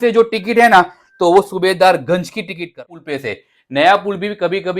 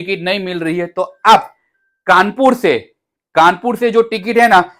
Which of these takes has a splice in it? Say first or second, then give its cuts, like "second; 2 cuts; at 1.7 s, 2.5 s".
first; 1 cut; at 2.8 s